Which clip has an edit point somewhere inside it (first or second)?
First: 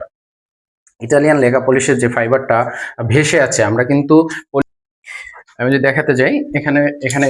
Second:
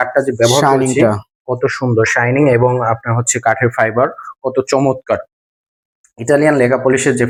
first